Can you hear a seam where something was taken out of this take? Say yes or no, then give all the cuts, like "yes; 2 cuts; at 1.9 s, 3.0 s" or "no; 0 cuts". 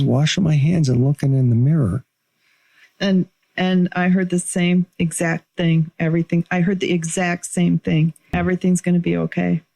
yes; 1 cut; at 8.3 s